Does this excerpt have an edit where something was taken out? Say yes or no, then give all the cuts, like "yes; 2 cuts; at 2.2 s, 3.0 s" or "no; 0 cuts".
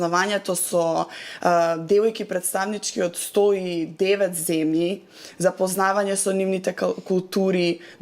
no; 0 cuts